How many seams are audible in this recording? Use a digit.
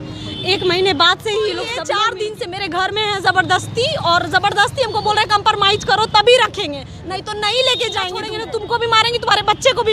2